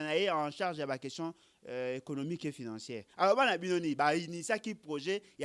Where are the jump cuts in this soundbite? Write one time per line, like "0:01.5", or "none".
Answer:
none